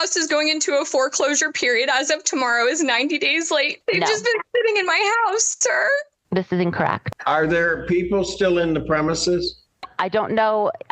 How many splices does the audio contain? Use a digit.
2